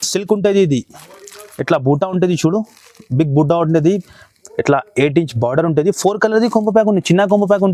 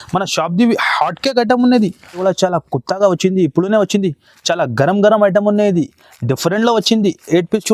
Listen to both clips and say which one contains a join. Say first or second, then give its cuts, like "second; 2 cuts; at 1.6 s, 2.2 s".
second; 1 cut; at 2.2 s